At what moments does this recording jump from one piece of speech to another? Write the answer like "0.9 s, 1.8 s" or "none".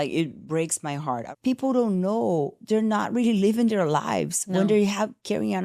1.3 s

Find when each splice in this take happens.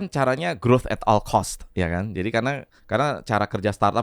1.6 s, 2.7 s

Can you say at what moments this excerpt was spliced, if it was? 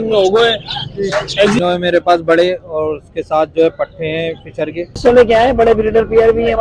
1.6 s, 4.9 s

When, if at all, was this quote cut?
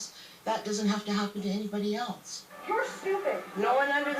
2.5 s

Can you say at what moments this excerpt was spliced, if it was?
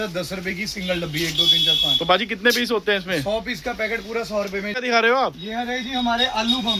4.8 s

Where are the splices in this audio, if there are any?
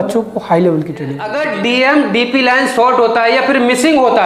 1.3 s

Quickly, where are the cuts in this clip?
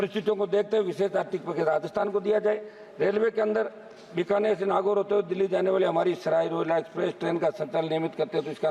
none

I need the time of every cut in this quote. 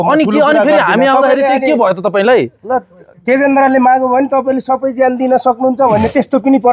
none

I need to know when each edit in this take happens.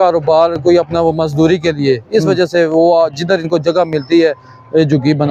none

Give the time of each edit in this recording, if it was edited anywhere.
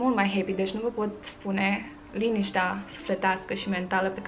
none

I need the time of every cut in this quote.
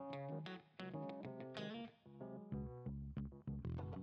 none

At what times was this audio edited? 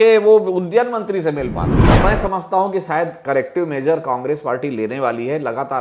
1.7 s

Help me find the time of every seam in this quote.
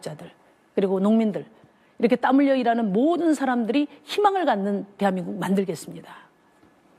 2.9 s

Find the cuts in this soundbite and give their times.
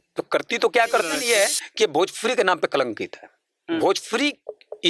1.2 s

